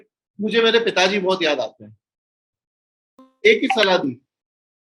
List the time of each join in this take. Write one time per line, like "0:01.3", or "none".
0:03.3

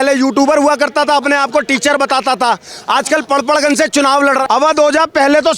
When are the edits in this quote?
0:04.4

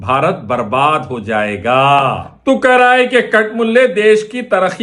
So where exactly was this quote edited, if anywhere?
0:02.3

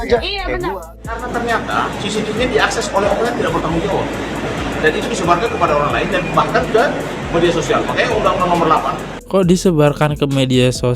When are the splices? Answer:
0:01.2
0:09.1

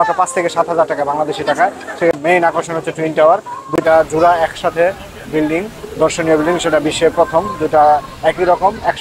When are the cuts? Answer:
0:02.2

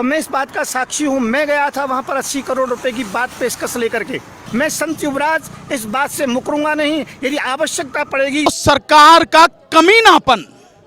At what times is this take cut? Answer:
0:04.4
0:08.5

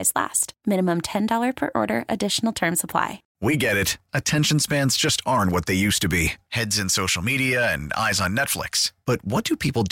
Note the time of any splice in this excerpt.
0:03.2

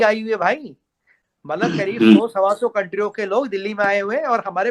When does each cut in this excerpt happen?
none

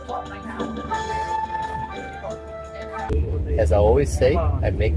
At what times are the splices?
0:03.1

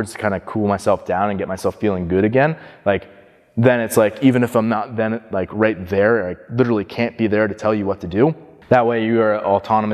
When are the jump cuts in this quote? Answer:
0:08.5

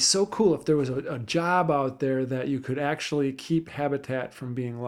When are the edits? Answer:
none

